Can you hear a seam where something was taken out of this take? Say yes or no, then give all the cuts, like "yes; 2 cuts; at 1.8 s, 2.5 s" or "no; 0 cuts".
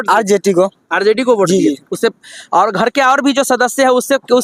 no; 0 cuts